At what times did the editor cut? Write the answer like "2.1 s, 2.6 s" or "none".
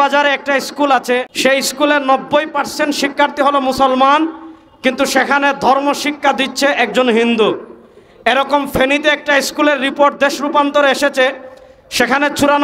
1.3 s

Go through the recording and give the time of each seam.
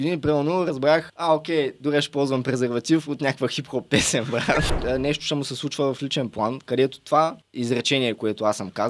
1.1 s, 4.7 s, 7.4 s

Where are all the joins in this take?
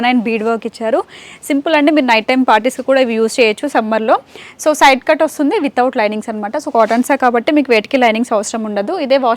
none

